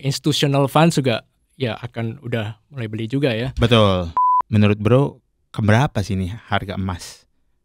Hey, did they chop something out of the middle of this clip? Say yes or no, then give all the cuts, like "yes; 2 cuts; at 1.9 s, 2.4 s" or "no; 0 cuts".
yes; 1 cut; at 4.1 s